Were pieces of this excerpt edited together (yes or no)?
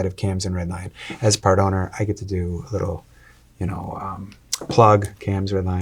no